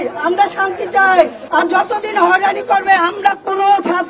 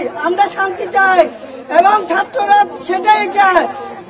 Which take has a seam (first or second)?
first